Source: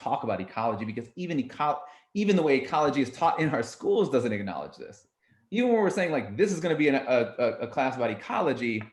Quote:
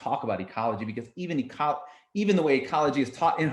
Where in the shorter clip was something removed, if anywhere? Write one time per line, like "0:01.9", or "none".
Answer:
none